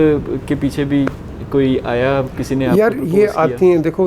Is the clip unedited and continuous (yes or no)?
yes